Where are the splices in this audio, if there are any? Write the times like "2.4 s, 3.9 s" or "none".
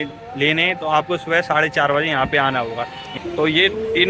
3.0 s